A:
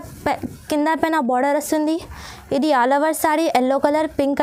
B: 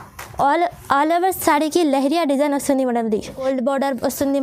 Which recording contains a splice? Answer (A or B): B